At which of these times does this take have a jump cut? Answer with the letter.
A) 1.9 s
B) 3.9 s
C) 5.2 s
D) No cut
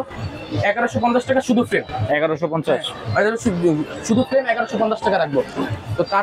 D